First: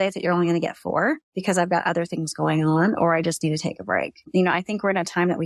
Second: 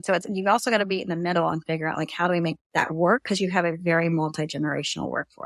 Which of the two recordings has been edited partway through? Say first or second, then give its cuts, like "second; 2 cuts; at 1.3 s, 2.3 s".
first; 2 cuts; at 1.3 s, 4.3 s